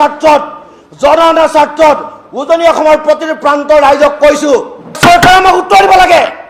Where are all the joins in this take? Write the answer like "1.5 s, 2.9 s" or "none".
5.0 s